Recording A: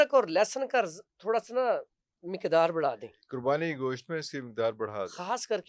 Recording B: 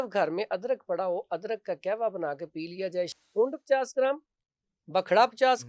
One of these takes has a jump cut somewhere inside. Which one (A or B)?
B